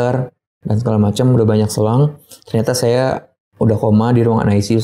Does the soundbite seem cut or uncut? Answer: uncut